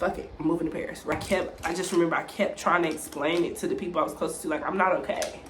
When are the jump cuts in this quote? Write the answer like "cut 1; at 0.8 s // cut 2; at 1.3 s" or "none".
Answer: cut 1; at 1.1 s